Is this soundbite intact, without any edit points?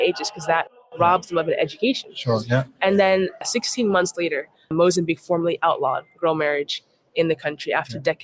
no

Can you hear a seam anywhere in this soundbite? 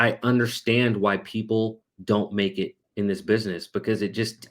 yes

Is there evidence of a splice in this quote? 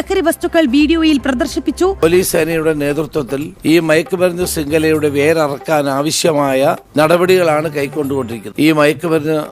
yes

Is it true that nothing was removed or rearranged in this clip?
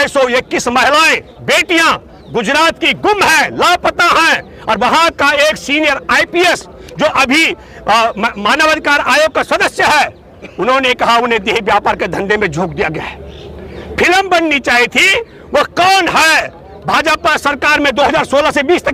yes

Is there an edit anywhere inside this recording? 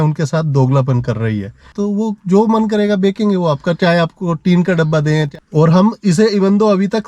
yes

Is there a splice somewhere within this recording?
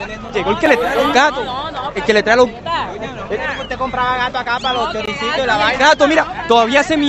no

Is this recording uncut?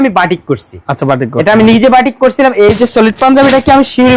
yes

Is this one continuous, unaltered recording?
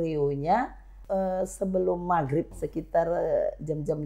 no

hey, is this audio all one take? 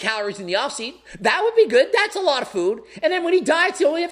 yes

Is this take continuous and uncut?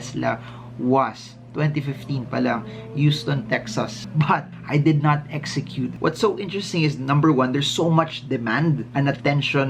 no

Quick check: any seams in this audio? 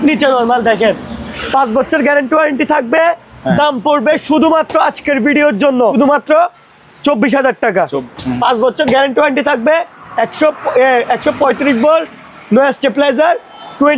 yes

